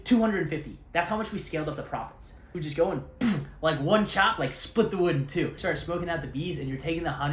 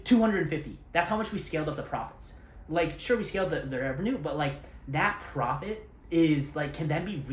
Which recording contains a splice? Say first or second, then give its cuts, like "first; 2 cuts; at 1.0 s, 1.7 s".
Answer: first; 2 cuts; at 2.5 s, 5.6 s